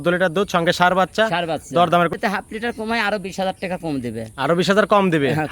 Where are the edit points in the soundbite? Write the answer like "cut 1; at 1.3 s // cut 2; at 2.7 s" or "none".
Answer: cut 1; at 2.1 s